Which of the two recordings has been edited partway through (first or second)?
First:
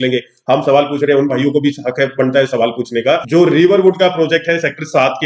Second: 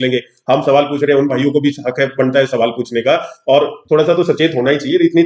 first